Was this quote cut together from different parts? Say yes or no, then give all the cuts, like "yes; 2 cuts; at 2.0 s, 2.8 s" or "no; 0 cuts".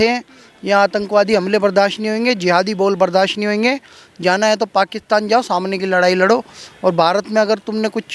no; 0 cuts